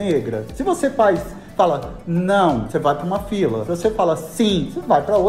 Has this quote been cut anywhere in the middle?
no; 0 cuts

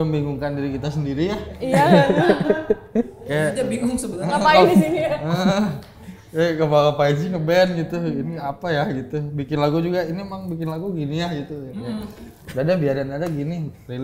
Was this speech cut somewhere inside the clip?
no; 0 cuts

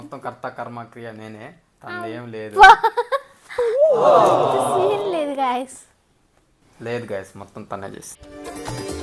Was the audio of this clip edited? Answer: no; 0 cuts

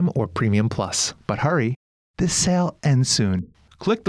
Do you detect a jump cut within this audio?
yes; 1 cut; at 1.1 s

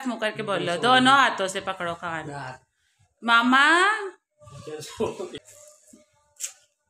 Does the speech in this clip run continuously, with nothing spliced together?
no; 1 cut; at 5.3 s

